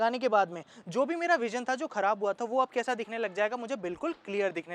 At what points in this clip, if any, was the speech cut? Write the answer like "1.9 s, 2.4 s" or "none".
none